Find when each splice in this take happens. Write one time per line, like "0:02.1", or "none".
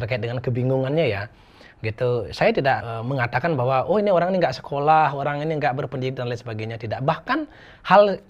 0:02.9